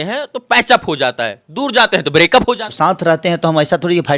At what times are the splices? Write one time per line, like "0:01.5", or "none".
0:02.7